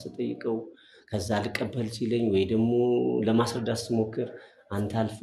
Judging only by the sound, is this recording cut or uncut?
uncut